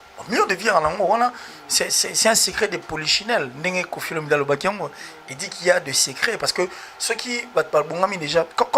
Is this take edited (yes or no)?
no